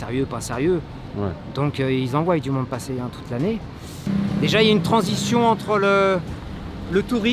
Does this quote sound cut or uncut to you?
cut